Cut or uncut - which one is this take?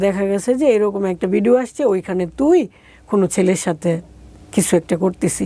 uncut